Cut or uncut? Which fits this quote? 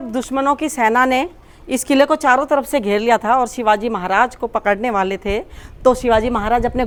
uncut